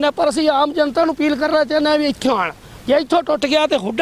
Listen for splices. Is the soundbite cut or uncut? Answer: uncut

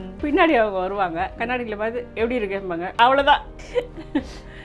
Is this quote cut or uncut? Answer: cut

